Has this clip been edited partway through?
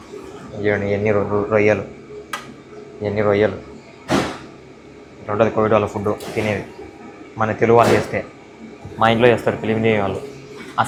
no; 0 cuts

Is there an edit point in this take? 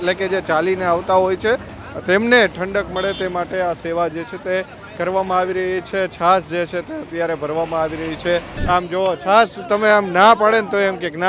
yes; 1 cut; at 8.5 s

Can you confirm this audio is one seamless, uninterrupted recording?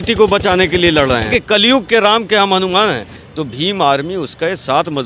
no; 2 cuts; at 1.3 s, 3.2 s

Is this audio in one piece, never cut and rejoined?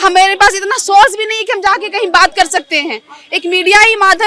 yes; 0 cuts

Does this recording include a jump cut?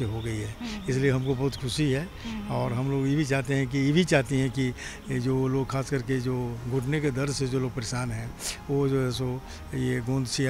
no; 0 cuts

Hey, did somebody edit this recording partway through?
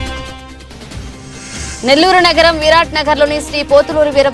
yes; 1 cut; at 1.5 s

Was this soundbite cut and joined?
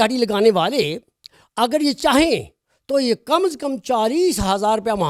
no; 0 cuts

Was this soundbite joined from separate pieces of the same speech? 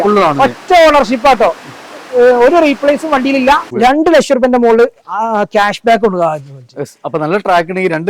yes; 1 cut; at 3.7 s

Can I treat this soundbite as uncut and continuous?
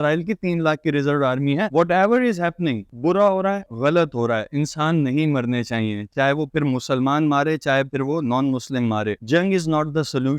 no; 1 cut; at 1.7 s

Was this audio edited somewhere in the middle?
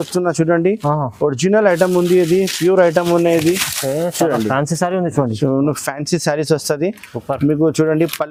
no; 0 cuts

